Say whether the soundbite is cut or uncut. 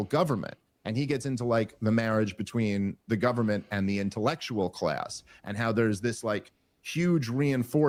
uncut